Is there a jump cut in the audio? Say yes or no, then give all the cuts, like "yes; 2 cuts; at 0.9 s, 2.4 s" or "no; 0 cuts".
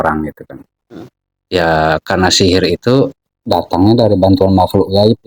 no; 0 cuts